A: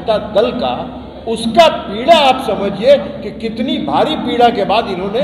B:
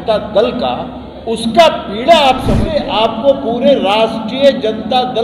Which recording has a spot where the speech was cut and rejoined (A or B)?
B